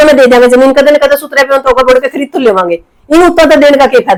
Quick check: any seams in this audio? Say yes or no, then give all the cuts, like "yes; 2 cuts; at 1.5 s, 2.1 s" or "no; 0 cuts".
no; 0 cuts